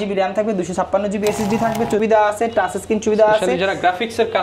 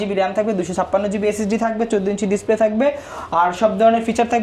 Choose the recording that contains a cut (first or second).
first